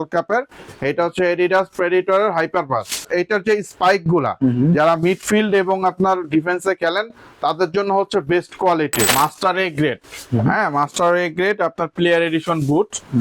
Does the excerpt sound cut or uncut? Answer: cut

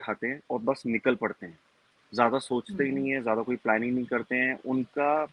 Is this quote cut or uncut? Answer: uncut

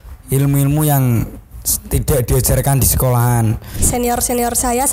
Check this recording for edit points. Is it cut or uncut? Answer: cut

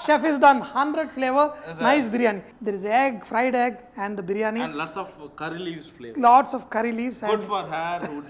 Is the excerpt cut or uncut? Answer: cut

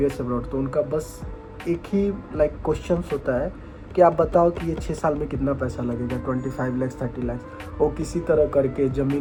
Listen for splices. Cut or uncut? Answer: uncut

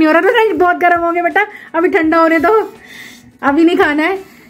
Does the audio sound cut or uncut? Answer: uncut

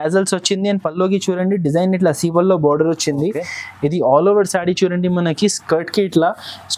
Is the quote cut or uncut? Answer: uncut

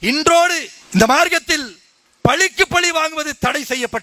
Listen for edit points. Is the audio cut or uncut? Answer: uncut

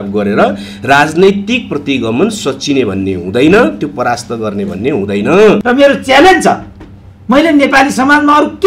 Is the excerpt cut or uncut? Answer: cut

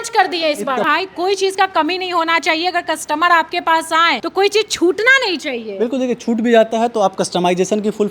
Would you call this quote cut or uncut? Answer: cut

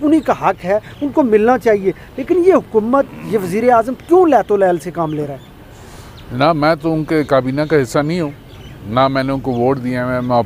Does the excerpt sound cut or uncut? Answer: uncut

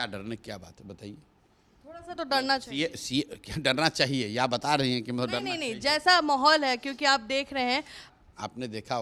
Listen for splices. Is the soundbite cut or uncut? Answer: uncut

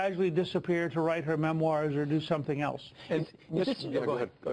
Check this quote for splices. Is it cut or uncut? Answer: cut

